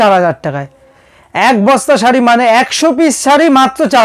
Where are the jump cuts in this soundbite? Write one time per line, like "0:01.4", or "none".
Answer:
none